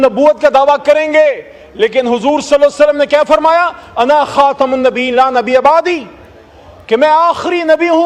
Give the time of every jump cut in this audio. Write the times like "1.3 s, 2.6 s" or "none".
none